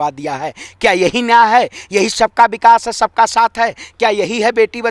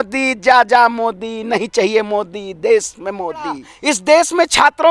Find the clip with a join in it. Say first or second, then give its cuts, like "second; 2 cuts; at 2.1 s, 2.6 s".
second; 1 cut; at 3.7 s